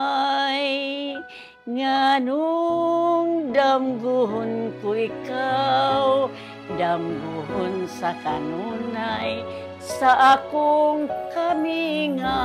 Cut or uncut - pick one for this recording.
uncut